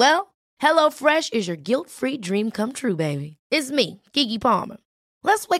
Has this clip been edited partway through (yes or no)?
no